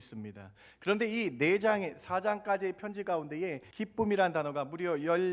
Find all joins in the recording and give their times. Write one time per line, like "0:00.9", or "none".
0:03.6